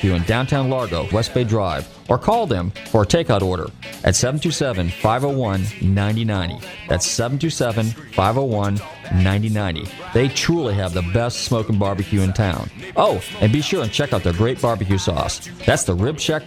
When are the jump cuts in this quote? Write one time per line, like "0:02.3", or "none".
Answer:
0:01.1